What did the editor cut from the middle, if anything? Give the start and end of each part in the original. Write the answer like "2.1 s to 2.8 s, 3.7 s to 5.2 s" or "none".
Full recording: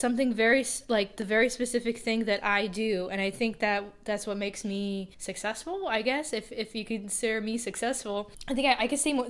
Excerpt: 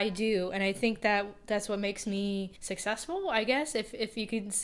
none